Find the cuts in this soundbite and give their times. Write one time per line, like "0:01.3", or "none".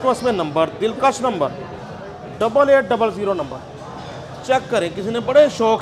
none